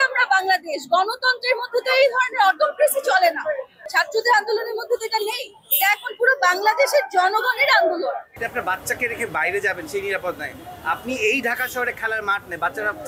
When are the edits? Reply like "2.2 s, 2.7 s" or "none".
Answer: 3.8 s, 8.4 s